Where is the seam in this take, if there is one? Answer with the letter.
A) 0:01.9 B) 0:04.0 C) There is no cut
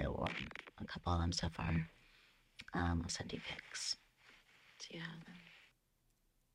C